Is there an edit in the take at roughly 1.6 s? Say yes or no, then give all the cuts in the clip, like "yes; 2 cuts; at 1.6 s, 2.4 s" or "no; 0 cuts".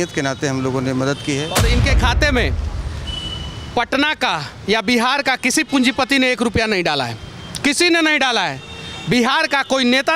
yes; 1 cut; at 1.6 s